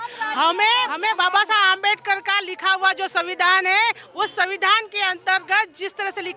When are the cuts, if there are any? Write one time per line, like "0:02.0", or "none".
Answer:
0:00.9